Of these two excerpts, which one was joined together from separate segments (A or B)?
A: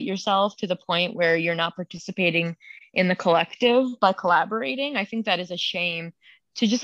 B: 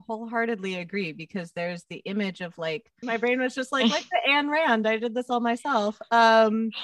B